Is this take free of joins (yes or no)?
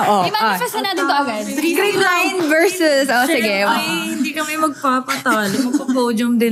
yes